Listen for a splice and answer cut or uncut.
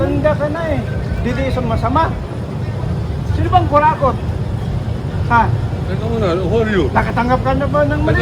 uncut